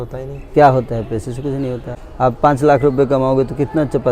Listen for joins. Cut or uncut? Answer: cut